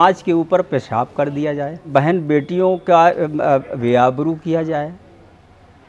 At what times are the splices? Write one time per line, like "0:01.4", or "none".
0:01.9